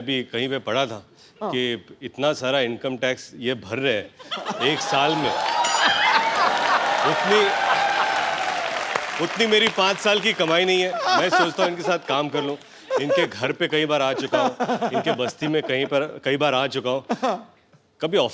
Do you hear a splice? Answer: no; 0 cuts

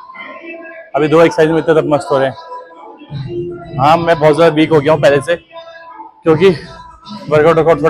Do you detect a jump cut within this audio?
no; 0 cuts

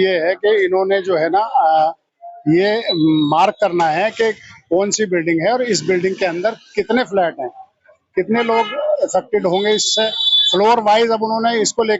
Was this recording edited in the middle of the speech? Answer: no; 0 cuts

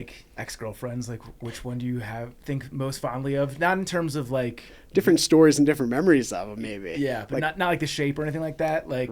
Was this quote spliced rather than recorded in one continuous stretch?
no; 0 cuts

